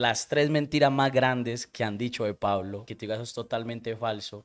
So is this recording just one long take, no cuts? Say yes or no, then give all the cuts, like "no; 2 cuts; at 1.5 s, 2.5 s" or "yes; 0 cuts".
yes; 0 cuts